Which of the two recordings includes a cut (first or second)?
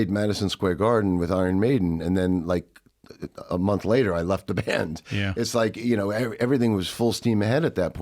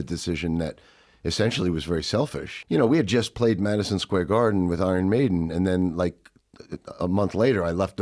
second